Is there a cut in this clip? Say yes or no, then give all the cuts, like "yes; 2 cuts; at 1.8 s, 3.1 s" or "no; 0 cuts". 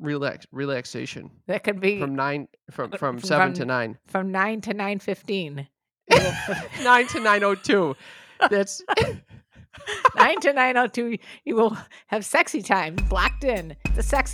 no; 0 cuts